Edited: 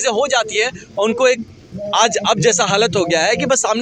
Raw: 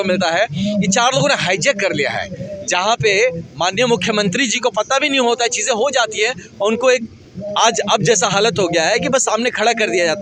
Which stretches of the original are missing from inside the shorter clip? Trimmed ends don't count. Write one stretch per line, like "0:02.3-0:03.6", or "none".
none